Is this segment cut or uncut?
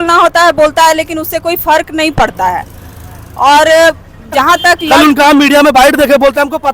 cut